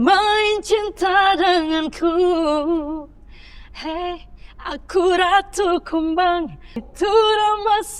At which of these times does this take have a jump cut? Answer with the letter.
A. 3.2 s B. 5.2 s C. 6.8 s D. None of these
C